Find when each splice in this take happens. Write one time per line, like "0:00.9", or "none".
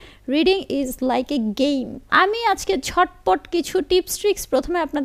0:02.1